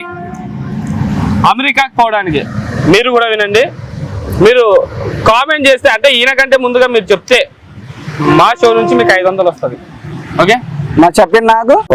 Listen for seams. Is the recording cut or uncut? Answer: uncut